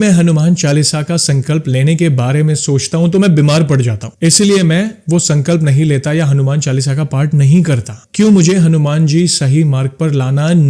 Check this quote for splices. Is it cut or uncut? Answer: uncut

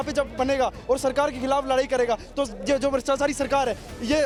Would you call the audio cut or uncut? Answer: uncut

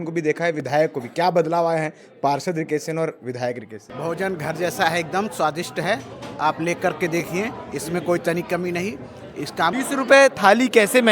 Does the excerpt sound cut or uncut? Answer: cut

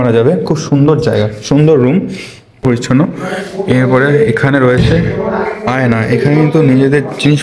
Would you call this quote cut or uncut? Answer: cut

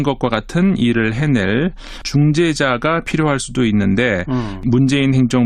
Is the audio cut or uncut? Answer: cut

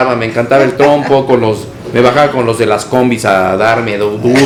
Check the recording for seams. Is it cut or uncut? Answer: uncut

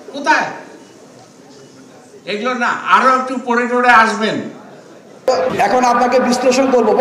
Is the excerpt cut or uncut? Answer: cut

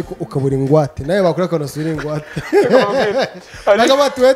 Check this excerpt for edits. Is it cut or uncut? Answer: uncut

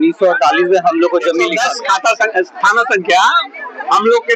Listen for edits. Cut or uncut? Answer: cut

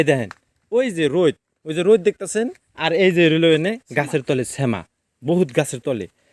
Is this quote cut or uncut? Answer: uncut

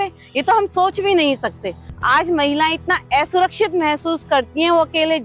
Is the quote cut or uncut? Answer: uncut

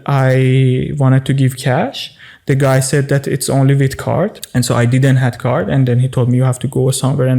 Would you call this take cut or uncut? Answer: cut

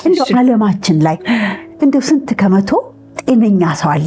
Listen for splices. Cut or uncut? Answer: uncut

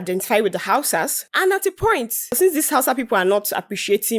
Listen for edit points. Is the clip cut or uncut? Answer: cut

